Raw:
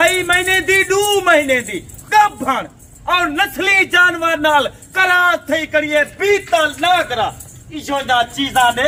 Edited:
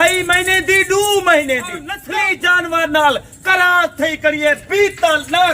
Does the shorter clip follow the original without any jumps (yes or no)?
no